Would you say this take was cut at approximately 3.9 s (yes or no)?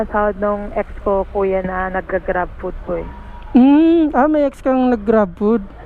no